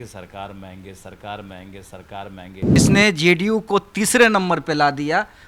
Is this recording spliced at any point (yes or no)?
yes